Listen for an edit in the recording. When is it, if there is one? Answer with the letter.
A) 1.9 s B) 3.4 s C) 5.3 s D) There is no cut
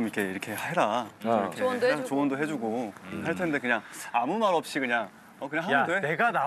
D